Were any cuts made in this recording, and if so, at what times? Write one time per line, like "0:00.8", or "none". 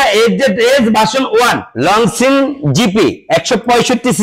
0:01.7